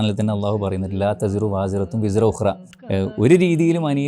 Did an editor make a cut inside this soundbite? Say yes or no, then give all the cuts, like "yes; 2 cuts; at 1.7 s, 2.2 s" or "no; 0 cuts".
yes; 1 cut; at 2.7 s